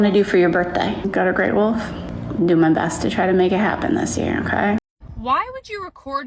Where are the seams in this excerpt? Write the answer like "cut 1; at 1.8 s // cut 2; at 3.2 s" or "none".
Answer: cut 1; at 1.1 s // cut 2; at 5.0 s